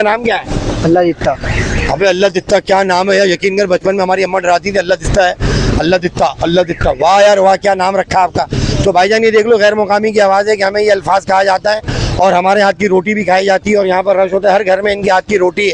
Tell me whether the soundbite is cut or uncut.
uncut